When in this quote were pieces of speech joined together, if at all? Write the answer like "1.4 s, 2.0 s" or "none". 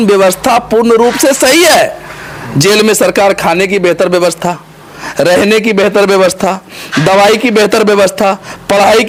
none